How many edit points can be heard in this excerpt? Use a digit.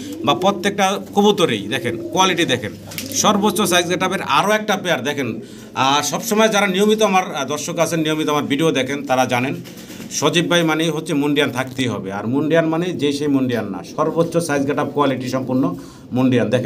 1